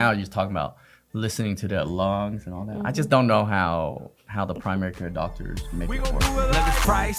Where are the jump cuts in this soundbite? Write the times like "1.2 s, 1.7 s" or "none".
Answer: 5.9 s